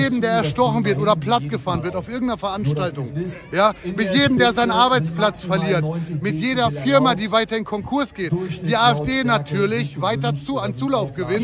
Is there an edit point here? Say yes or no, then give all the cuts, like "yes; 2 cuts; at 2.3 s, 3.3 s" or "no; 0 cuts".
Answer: no; 0 cuts